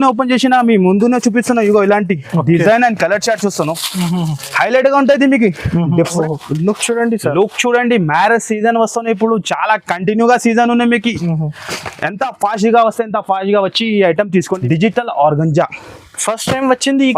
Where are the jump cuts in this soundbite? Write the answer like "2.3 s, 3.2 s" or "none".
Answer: 6.2 s, 14.5 s